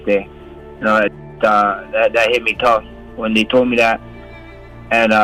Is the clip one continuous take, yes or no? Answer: yes